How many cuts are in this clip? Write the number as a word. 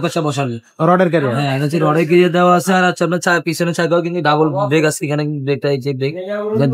zero